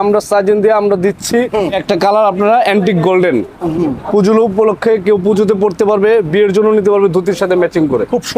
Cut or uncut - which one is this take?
cut